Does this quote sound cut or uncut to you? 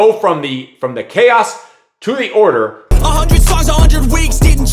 cut